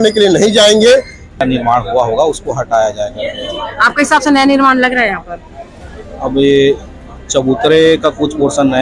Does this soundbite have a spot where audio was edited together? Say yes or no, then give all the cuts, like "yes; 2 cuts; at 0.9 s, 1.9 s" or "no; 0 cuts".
yes; 1 cut; at 1.4 s